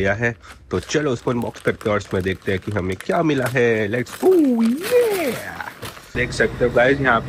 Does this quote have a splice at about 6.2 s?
yes; 1 cut; at 6.2 s

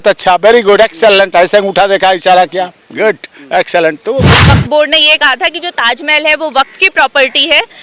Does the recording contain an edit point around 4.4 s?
yes; 1 cut; at 4.4 s

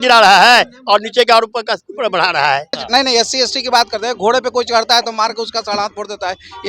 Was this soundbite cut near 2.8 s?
yes; 1 cut; at 2.8 s

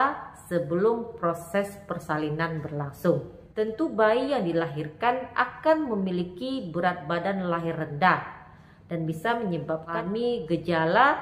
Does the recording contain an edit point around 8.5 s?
no; 2 cuts; at 3.4 s, 9.9 s

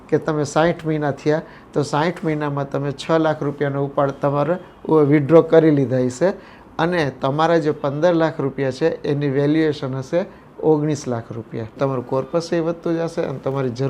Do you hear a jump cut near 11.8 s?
yes; 1 cut; at 11.8 s

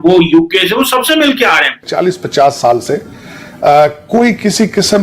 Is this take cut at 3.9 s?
no; 1 cut; at 1.9 s

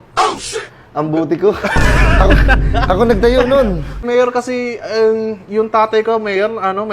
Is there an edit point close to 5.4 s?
no; 1 cut; at 4.0 s

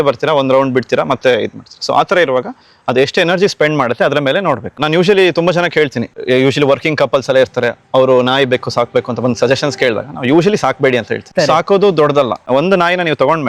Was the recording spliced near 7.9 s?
no; 4 cuts; at 4.8 s, 6.1 s, 11.3 s, 12.4 s

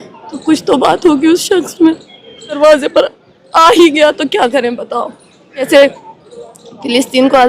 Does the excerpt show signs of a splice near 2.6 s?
yes; 2 cuts; at 2.6 s, 5.7 s

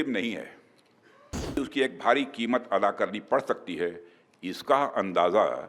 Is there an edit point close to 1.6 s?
yes; 1 cut; at 1.6 s

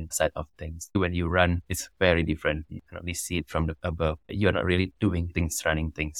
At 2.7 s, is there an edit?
yes; 2 cuts; at 1.0 s, 2.7 s

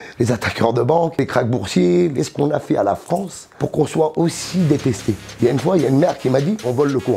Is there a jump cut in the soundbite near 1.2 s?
yes; 1 cut; at 1.2 s

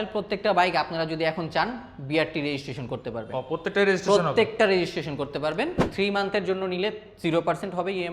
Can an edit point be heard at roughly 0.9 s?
no; 1 cut; at 5.9 s

